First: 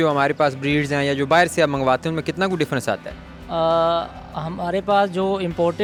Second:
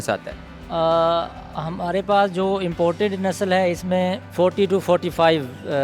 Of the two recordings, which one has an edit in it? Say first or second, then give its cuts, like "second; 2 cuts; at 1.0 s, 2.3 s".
second; 1 cut; at 4.2 s